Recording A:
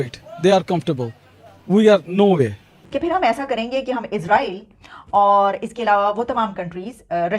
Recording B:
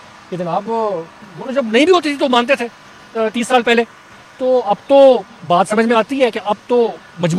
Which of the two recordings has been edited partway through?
A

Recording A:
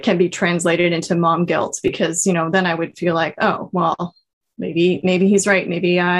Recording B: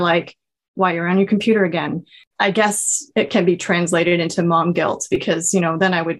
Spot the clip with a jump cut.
B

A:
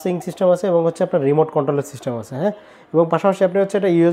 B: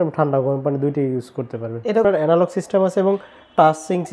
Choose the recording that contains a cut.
B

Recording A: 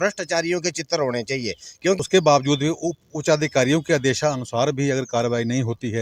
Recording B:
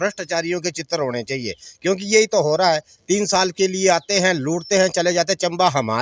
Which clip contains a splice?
A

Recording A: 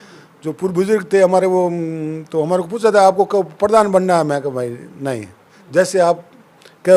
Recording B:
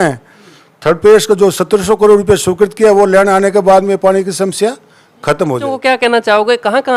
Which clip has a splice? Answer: B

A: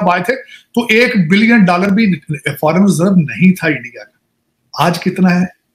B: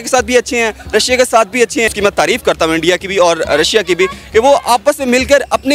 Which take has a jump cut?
B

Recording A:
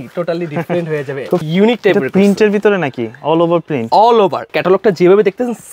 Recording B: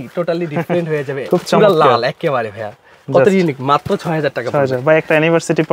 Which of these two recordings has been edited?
A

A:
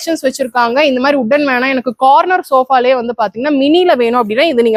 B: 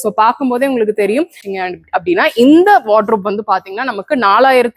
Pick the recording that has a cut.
B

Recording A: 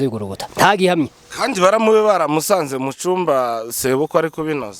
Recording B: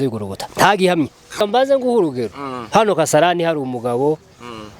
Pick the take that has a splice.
B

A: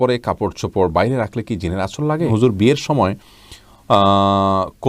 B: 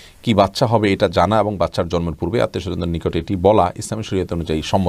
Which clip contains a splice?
A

